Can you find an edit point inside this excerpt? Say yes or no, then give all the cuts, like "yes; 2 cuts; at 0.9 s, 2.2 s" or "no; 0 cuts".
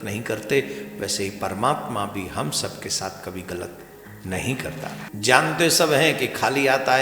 yes; 1 cut; at 5.0 s